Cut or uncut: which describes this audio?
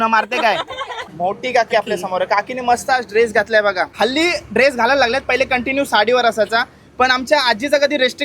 cut